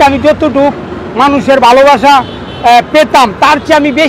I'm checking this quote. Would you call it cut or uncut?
uncut